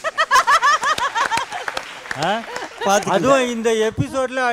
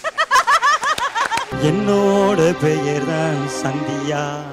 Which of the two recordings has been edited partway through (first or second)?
second